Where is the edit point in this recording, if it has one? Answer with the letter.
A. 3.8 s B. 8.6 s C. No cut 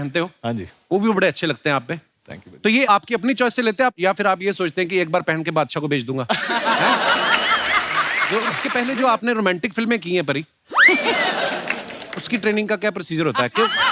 B